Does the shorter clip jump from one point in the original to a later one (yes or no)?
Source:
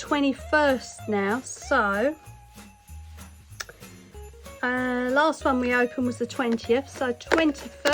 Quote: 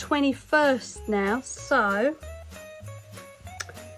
no